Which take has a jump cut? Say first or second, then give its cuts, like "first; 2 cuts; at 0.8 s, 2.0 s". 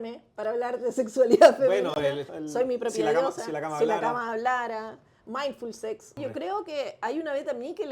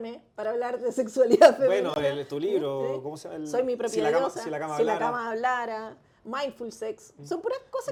first; 2 cuts; at 2.3 s, 6.1 s